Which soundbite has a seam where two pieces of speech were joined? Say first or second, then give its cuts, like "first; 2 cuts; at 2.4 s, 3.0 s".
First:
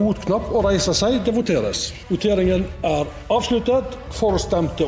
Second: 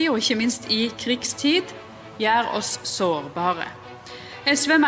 first; 1 cut; at 1.9 s